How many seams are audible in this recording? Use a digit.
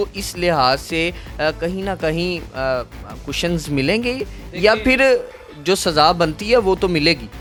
0